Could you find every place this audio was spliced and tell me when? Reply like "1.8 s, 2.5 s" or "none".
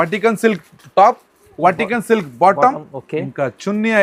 none